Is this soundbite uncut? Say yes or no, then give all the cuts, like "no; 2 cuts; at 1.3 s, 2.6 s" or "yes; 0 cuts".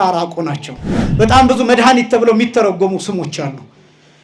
no; 1 cut; at 1.0 s